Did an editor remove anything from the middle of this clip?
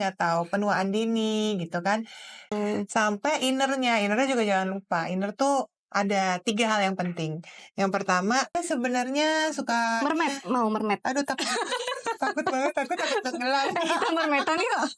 yes; 2 cuts; at 2.5 s, 8.6 s

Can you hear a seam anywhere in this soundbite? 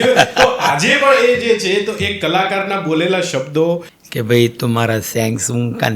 yes; 1 cut; at 3.9 s

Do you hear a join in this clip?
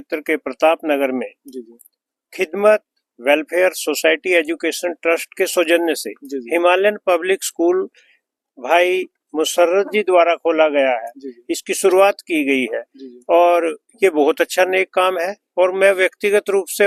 no; 0 cuts

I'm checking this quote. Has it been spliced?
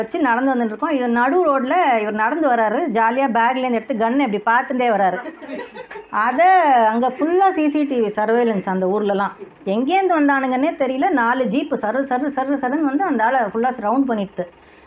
no; 0 cuts

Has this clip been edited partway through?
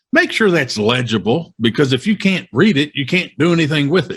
no; 0 cuts

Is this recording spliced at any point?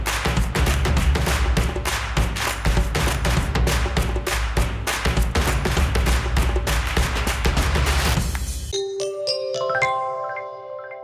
yes; 1 cut; at 8.5 s

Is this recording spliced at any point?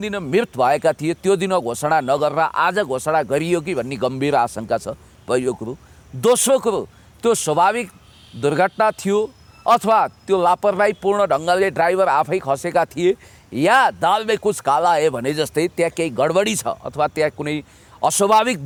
no; 0 cuts

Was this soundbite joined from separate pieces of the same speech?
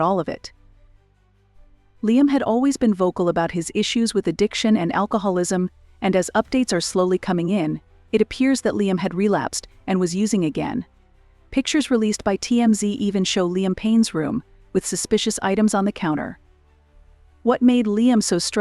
yes; 1 cut; at 11.9 s

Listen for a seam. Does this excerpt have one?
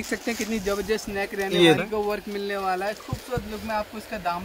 yes; 1 cut; at 1.8 s

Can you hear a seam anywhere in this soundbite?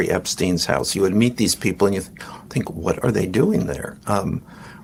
no; 0 cuts

